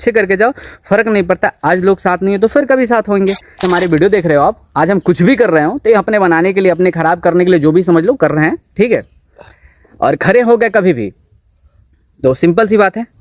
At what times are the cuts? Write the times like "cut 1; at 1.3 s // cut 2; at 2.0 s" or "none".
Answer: cut 1; at 3.6 s